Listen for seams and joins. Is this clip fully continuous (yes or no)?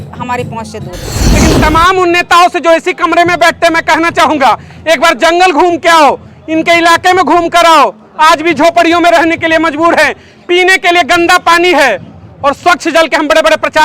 no